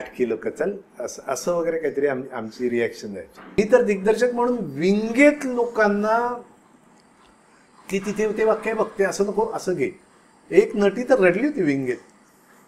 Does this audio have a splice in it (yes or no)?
yes